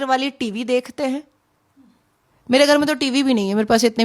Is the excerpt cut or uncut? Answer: uncut